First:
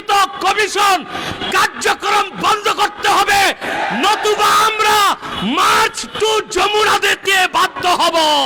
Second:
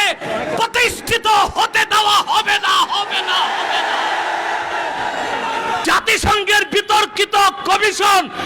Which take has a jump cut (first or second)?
second